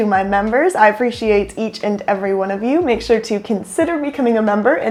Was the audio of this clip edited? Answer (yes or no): no